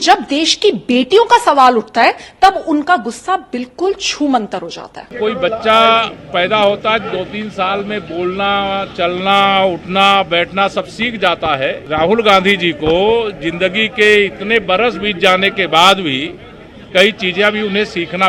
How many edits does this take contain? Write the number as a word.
two